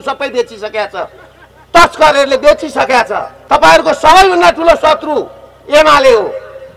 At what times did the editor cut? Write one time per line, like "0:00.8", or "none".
0:03.3